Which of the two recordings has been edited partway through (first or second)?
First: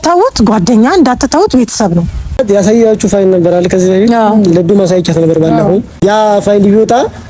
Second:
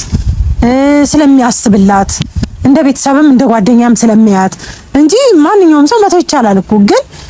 first